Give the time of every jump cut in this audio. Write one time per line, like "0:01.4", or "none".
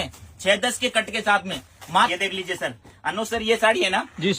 0:02.1